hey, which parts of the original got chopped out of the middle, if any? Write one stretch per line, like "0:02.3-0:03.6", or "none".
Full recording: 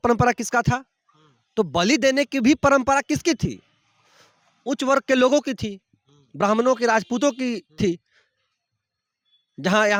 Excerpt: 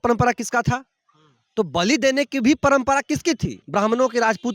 0:03.6-0:06.2